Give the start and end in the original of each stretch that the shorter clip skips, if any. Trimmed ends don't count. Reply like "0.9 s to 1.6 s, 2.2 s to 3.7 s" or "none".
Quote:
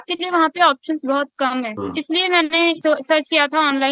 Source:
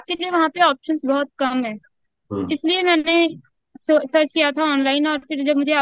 1.7 s to 2.3 s, 3.3 s to 3.8 s